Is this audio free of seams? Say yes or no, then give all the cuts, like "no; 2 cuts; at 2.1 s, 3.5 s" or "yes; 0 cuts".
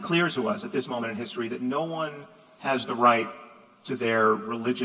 yes; 0 cuts